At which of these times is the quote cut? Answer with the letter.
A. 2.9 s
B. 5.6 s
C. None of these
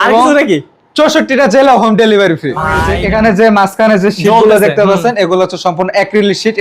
A